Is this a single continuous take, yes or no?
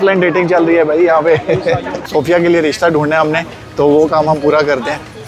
no